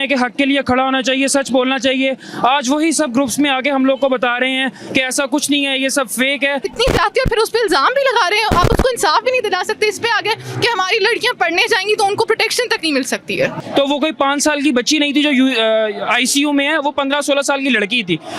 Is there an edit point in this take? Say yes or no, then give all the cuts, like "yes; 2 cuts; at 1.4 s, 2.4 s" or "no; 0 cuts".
yes; 2 cuts; at 6.7 s, 13.6 s